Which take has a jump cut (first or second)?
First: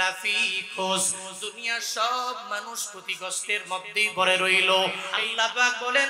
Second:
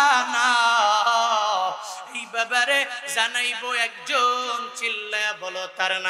first